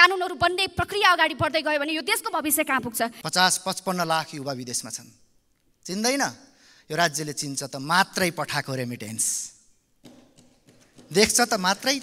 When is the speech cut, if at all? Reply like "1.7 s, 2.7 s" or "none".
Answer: 3.2 s